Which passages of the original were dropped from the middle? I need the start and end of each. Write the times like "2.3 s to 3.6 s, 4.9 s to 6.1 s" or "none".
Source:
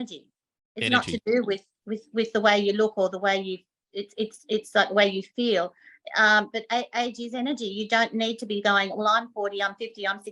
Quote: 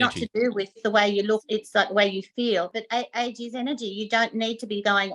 1.7 s to 2.3 s, 2.9 s to 4.4 s, 5.8 s to 6.6 s